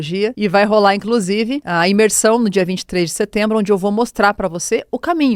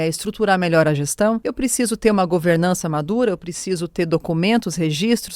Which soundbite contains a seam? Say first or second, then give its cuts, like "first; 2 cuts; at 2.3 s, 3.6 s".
second; 1 cut; at 1.5 s